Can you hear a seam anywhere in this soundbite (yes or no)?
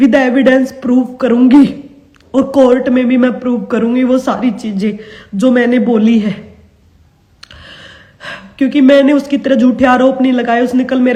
no